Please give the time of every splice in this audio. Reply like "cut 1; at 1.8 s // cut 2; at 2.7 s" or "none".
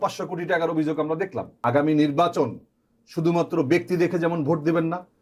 cut 1; at 1.5 s